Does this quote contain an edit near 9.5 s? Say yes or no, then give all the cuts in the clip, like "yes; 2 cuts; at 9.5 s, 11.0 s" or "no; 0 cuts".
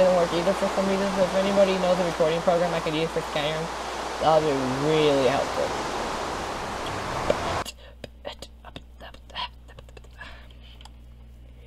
no; 1 cut; at 1.8 s